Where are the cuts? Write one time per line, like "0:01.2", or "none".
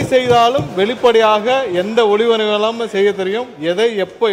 none